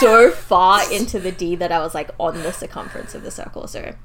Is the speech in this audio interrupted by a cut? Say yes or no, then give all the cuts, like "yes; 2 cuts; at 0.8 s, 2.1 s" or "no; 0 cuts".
no; 0 cuts